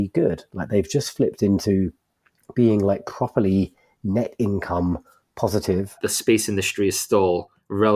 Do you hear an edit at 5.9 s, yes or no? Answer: yes